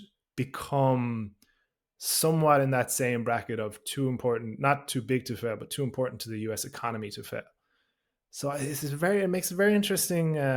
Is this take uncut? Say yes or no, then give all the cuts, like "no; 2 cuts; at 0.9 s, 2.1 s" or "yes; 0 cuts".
yes; 0 cuts